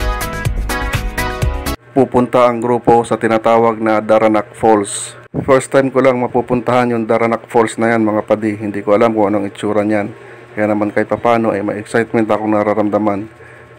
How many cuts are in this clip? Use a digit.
1